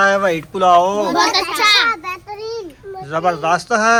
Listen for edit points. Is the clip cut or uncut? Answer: uncut